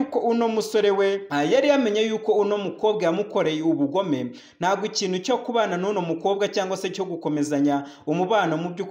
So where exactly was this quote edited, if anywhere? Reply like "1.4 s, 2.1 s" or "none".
1.2 s